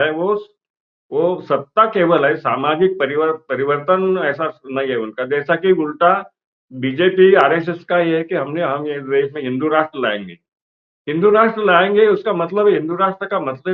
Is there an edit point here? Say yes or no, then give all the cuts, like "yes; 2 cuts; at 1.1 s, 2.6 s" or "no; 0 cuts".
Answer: no; 0 cuts